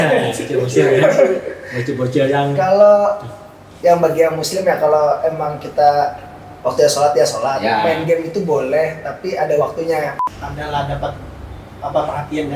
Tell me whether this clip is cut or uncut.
cut